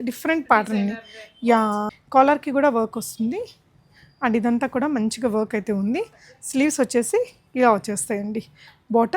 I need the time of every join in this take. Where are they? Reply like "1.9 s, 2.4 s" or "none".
1.9 s